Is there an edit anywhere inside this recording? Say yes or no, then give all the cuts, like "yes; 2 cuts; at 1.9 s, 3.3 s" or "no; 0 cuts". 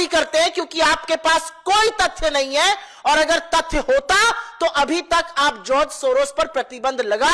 no; 0 cuts